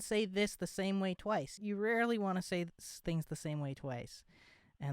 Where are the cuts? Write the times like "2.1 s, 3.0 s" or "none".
1.6 s